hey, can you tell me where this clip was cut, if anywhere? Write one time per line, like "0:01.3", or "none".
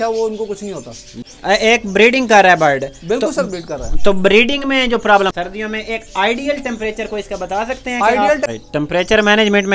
0:01.1
0:05.3
0:08.5